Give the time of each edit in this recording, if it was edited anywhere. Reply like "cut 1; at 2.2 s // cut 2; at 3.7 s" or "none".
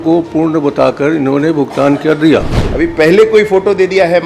cut 1; at 2.6 s